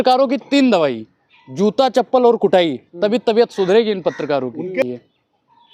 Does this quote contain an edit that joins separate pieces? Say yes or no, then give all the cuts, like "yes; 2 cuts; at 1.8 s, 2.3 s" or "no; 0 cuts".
yes; 1 cut; at 4.8 s